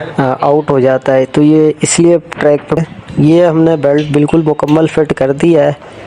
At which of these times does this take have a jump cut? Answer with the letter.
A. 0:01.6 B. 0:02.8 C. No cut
B